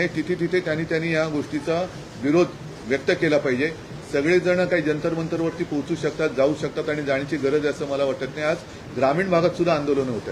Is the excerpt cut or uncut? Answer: uncut